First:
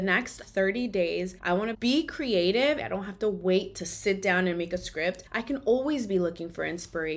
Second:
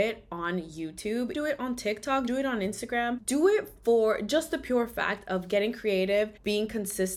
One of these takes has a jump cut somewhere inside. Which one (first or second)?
first